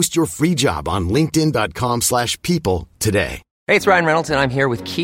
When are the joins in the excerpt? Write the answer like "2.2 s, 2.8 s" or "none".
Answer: 3.5 s